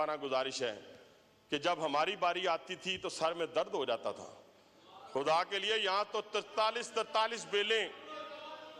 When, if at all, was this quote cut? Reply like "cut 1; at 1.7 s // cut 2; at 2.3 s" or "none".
none